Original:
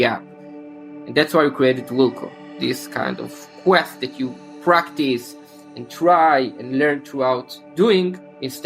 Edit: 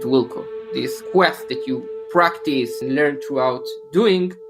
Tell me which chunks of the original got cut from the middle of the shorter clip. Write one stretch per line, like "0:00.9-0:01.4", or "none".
0:02.8-0:03.5
0:05.3-0:06.6